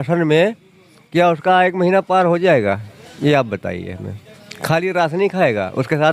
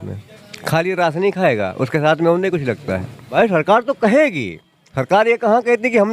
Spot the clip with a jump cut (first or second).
second